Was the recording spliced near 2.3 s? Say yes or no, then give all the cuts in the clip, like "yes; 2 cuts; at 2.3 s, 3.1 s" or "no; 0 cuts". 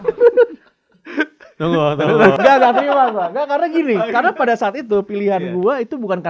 yes; 1 cut; at 2.3 s